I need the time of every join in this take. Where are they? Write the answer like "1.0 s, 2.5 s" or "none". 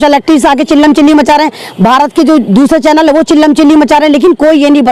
none